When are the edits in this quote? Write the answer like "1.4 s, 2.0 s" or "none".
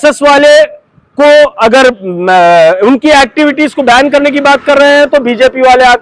none